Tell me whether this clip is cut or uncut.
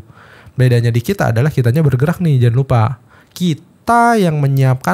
uncut